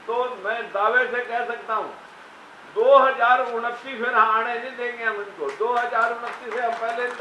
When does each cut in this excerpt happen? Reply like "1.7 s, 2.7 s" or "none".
none